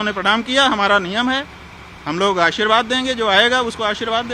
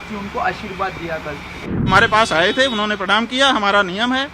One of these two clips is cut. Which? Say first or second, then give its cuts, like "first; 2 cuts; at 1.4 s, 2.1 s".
second; 1 cut; at 1.9 s